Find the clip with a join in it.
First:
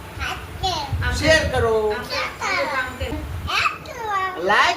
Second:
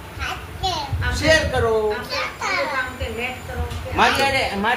first; 1 cut; at 3.1 s

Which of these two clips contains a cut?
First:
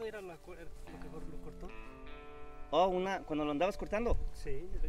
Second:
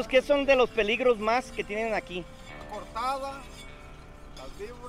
second; 1 cut; at 2.6 s

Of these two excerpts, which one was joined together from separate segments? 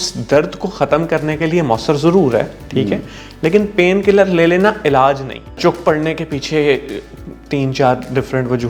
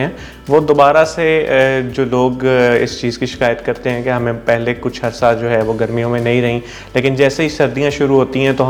first; 1 cut; at 5.6 s

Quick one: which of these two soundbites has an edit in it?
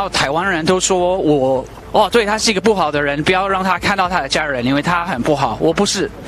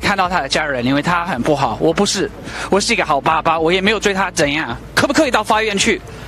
second; 1 cut; at 4.8 s

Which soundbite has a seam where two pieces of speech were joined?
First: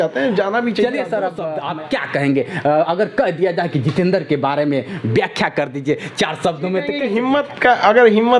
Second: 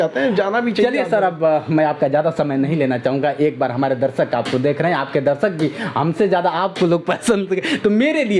first; 2 cuts; at 1.4 s, 7.1 s

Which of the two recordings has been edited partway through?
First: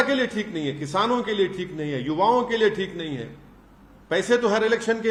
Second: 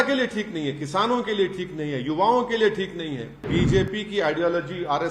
second; 1 cut; at 3.5 s

